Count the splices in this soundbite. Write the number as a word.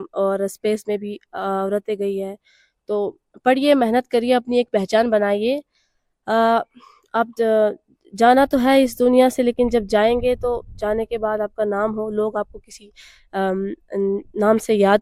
zero